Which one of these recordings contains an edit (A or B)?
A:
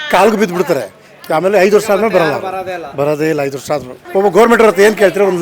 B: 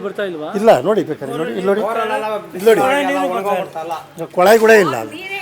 A